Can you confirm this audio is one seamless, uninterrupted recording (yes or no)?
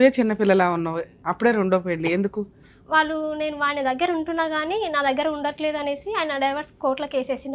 no